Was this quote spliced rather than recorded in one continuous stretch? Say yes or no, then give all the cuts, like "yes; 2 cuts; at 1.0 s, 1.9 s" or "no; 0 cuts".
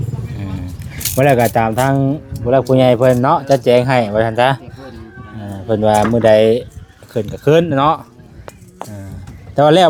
no; 0 cuts